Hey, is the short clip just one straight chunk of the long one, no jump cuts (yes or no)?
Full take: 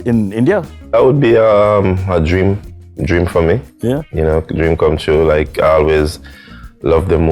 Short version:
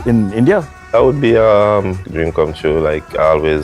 no